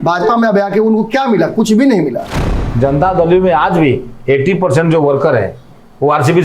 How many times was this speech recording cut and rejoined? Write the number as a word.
one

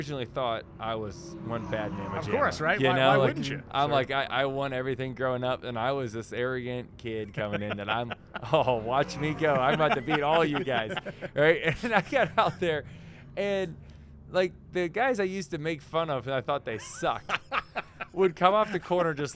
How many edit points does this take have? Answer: zero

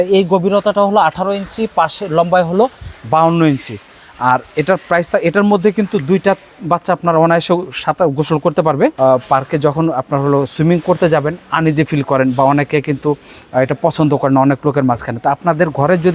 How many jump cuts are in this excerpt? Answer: one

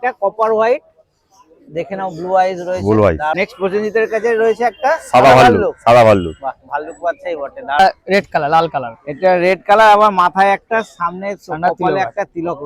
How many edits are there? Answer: two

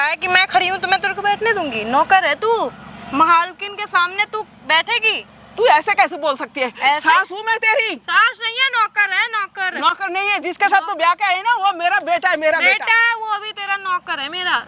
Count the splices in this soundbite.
zero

